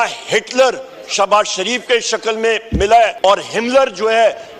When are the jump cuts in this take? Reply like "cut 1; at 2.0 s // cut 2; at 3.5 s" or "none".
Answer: cut 1; at 3.1 s